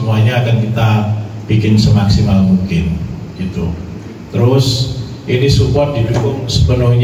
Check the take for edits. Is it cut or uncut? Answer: uncut